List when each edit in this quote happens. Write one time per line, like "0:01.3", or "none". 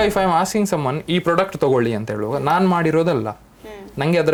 none